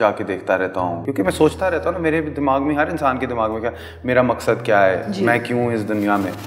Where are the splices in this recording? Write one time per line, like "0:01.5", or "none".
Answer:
0:01.0

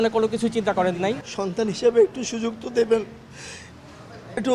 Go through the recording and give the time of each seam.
0:01.3

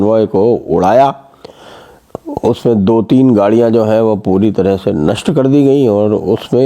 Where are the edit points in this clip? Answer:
none

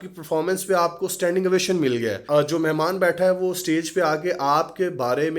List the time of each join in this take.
0:02.2

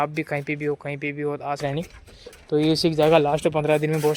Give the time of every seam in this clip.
0:01.6

